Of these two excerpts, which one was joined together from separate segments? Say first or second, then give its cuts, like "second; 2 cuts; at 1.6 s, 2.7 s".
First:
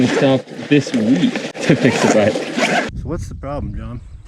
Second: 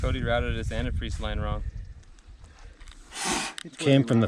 first; 2 cuts; at 1.5 s, 2.9 s